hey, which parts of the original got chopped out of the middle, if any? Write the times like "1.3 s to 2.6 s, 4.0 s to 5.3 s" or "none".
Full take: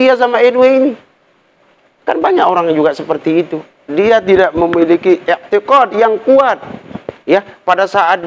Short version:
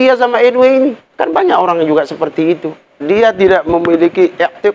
1.0 s to 1.9 s